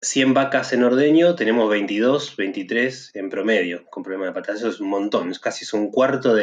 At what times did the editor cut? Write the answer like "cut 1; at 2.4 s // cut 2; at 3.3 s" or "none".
none